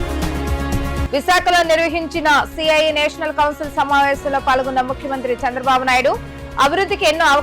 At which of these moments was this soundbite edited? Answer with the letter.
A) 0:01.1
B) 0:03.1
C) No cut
A